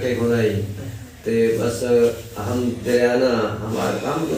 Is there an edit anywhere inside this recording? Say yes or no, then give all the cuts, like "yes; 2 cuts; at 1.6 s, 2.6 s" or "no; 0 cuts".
no; 0 cuts